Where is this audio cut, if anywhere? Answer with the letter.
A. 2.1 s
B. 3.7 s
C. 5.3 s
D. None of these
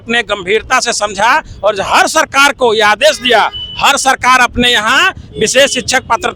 D